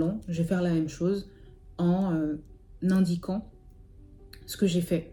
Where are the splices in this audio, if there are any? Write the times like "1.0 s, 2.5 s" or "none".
none

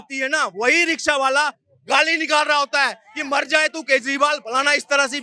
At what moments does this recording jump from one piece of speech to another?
none

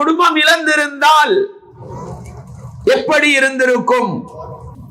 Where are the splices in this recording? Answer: none

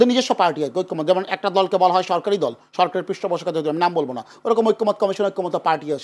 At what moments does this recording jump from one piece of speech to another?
none

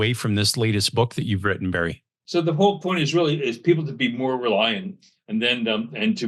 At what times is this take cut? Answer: 2.2 s

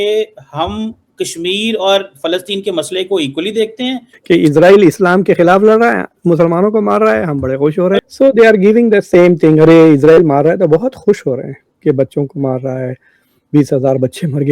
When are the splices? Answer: 4.1 s, 8.0 s

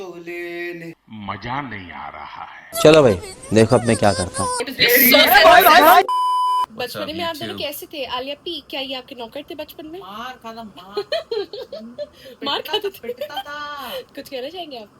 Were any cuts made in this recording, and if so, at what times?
6.7 s, 14.1 s

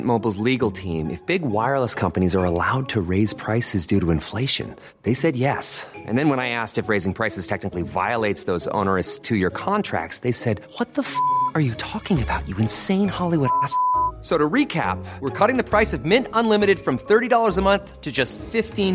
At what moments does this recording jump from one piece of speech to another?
none

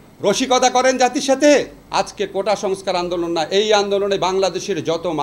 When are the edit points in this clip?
1.8 s

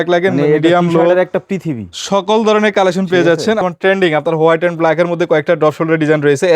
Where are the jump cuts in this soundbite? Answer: 3.6 s

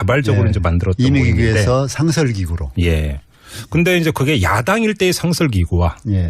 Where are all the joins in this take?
2.2 s

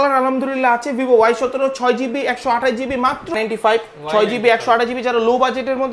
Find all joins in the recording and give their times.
3.3 s

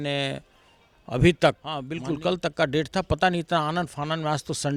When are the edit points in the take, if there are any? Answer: 1.9 s

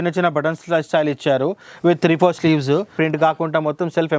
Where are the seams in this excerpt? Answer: 3.0 s

